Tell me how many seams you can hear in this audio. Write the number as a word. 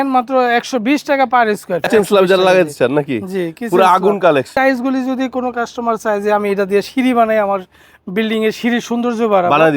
two